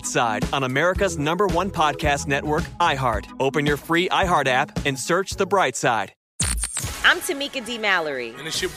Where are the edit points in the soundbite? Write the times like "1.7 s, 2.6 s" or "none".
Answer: 6.2 s